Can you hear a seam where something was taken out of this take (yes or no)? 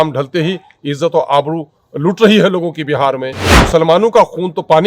yes